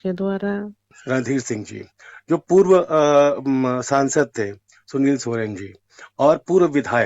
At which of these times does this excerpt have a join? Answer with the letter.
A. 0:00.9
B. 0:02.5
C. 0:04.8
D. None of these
A